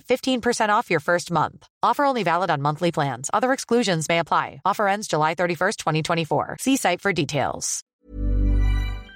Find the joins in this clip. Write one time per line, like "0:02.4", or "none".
0:08.0